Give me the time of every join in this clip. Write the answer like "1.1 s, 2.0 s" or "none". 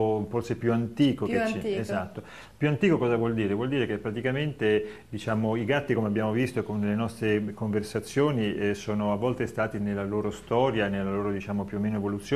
2.6 s